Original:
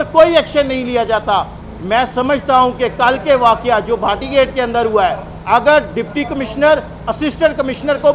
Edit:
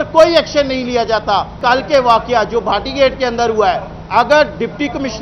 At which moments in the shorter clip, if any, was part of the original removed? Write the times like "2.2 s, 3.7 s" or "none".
1.6 s